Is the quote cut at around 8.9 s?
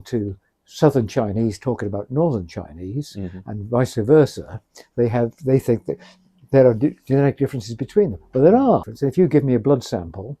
yes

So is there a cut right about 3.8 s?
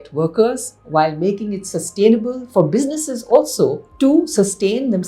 yes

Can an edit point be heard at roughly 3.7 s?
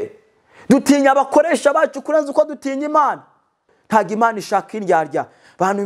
yes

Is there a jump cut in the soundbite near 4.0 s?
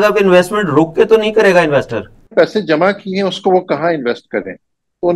no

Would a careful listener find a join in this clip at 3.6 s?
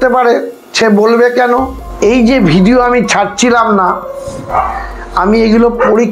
no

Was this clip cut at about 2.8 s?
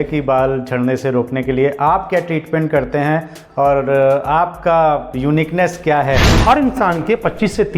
no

